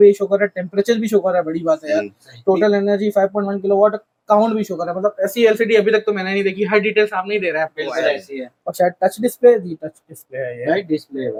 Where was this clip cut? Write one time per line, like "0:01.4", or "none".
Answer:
none